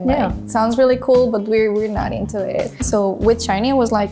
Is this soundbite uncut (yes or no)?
no